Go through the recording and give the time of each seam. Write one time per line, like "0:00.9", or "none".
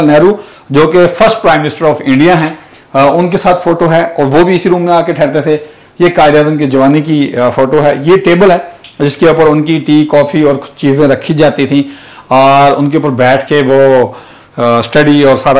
none